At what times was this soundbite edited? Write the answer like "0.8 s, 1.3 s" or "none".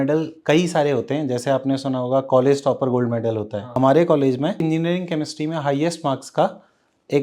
3.6 s, 4.6 s